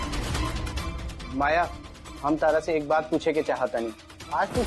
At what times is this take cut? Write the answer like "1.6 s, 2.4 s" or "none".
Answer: 1.1 s